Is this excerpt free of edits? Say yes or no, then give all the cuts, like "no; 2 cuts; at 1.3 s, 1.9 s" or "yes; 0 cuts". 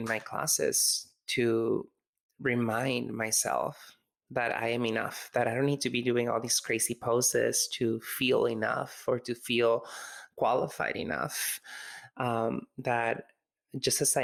yes; 0 cuts